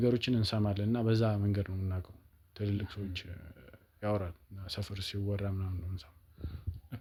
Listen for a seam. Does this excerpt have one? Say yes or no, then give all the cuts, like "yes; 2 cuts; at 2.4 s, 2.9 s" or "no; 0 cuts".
no; 0 cuts